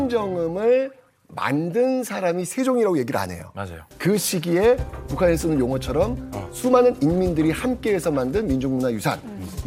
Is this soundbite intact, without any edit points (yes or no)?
no